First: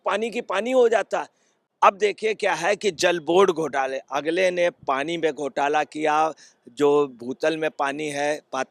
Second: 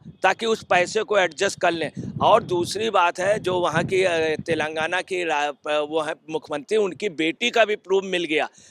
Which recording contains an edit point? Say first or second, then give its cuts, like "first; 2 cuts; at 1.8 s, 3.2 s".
first; 1 cut; at 1.7 s